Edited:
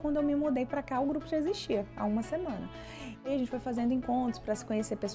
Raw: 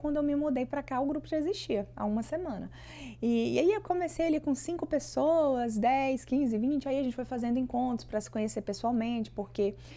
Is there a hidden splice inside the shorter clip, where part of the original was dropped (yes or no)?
yes